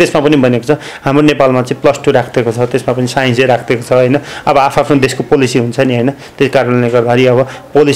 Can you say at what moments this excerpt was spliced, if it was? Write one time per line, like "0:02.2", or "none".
none